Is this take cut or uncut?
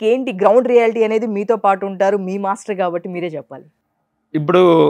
cut